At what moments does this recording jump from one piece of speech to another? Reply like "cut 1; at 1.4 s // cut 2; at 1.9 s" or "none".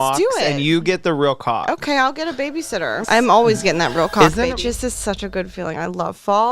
cut 1; at 3.0 s // cut 2; at 4.5 s